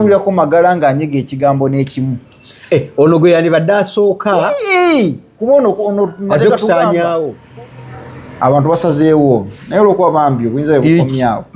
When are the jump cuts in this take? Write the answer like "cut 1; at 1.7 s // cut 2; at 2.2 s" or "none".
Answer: cut 1; at 7.4 s